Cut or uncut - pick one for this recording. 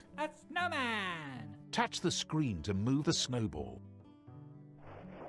uncut